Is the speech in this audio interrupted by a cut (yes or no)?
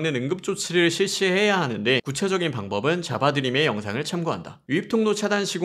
yes